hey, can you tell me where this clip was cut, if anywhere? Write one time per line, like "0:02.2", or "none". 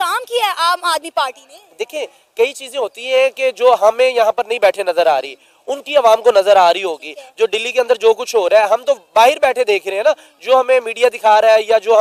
none